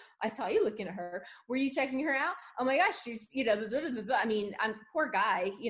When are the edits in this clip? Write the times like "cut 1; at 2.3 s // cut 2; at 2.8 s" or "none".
none